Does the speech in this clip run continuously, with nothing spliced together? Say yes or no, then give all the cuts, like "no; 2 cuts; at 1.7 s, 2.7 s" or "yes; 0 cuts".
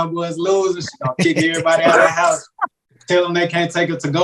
yes; 0 cuts